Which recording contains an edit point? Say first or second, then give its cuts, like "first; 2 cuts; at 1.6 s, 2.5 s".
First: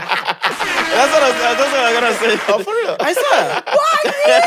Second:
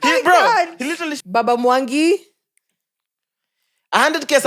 second; 1 cut; at 1.1 s